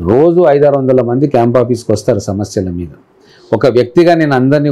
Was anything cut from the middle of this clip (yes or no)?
no